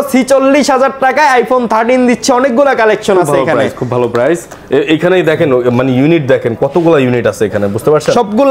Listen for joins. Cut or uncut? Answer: uncut